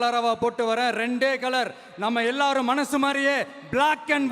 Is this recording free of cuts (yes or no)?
yes